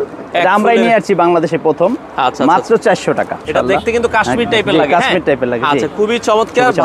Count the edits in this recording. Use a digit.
1